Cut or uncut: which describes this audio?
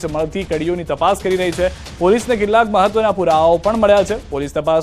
cut